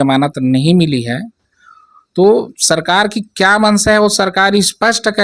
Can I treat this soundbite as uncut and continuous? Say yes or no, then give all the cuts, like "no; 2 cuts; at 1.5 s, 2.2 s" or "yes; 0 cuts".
yes; 0 cuts